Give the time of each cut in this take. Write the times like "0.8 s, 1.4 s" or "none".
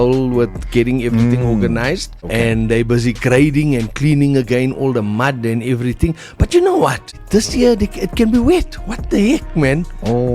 2.1 s, 7.2 s